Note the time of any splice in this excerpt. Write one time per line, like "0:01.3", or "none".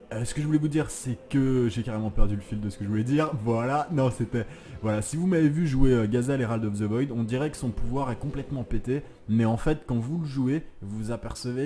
none